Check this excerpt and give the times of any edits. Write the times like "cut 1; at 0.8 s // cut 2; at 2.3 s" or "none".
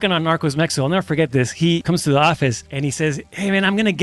cut 1; at 1.8 s // cut 2; at 3.1 s